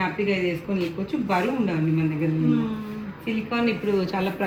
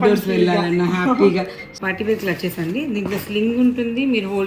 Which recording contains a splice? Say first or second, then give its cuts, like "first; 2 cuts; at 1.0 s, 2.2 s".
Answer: second; 1 cut; at 1.7 s